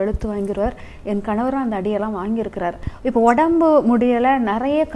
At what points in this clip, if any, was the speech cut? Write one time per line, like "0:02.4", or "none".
0:02.8